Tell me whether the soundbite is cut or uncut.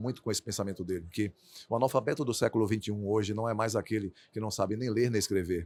uncut